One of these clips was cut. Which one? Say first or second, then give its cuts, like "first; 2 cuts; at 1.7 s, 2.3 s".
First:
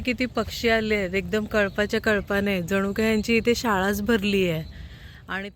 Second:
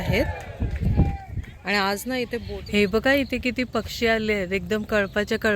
second; 1 cut; at 2.4 s